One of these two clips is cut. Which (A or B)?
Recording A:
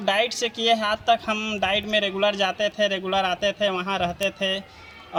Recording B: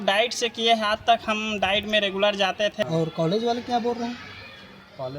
B